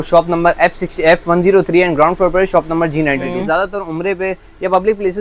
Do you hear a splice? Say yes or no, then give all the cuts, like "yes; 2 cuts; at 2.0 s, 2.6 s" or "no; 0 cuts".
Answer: yes; 1 cut; at 3.3 s